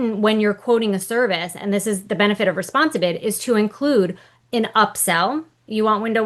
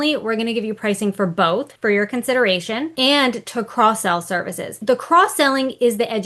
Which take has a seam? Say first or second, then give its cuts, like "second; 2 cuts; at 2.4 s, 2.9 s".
second; 3 cuts; at 1.7 s, 2.9 s, 4.8 s